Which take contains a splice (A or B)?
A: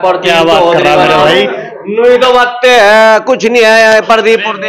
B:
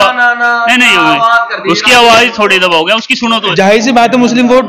B